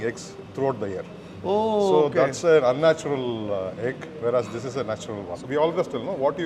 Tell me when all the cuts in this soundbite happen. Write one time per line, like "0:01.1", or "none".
0:01.2
0:05.3